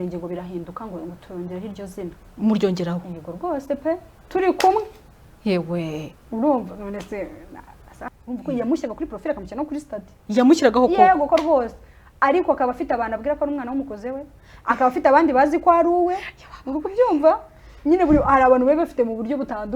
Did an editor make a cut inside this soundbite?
yes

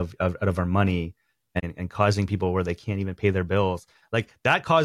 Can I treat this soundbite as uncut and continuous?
no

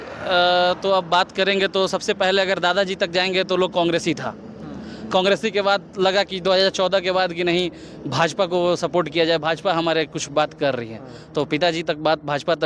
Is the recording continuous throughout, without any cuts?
yes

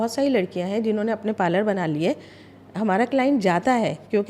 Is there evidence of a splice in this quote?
no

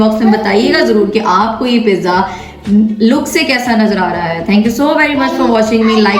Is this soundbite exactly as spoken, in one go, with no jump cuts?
yes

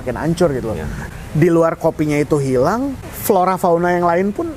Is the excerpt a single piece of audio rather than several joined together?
no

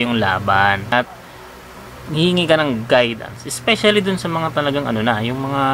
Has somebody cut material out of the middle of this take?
yes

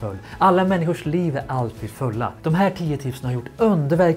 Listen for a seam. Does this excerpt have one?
yes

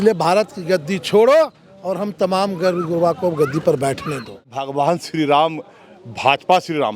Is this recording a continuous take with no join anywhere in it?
no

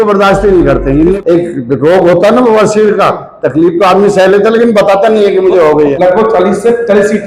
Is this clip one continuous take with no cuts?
no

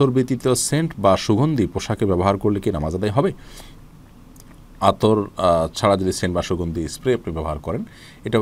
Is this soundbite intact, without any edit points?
yes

